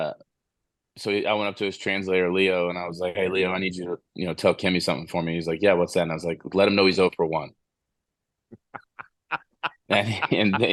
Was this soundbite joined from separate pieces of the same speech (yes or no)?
no